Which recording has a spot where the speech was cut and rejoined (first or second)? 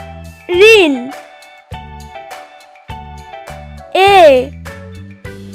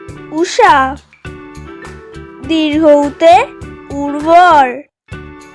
first